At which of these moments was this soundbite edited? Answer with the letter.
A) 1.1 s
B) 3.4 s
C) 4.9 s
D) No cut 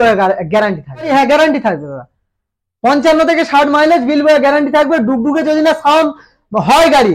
A